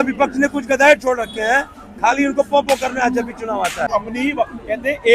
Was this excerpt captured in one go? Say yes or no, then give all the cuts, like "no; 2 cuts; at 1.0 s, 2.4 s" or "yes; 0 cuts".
no; 1 cut; at 3.9 s